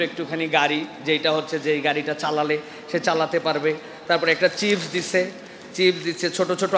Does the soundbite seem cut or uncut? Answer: uncut